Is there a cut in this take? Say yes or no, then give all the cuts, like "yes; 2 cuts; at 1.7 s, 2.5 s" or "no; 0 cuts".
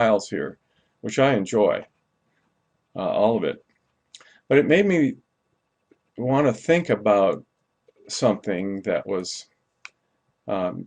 yes; 1 cut; at 3.4 s